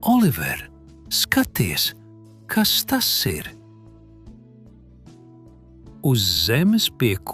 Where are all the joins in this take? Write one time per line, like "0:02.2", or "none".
0:04.2
0:06.0